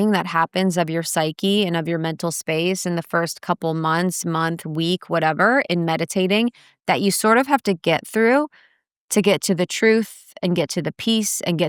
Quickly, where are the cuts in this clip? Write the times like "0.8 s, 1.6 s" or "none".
none